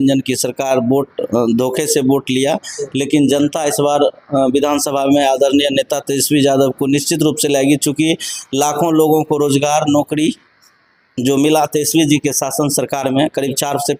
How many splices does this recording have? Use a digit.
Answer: 0